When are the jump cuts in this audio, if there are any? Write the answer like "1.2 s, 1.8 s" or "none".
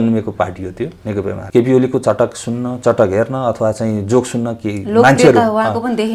1.4 s